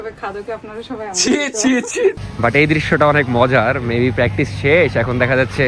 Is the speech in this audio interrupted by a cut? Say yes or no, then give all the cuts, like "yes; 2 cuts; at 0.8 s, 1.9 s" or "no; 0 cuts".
yes; 1 cut; at 2.2 s